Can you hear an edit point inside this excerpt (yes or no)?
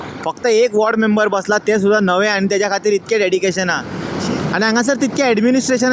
no